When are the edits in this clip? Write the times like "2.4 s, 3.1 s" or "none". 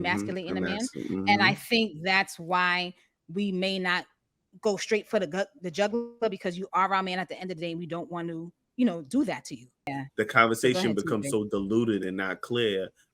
10.0 s